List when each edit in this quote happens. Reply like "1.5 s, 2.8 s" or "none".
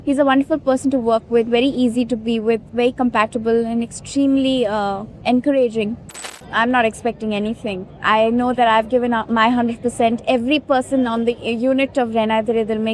2.7 s, 5.1 s, 6.1 s